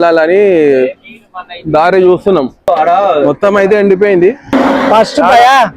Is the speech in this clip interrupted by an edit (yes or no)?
yes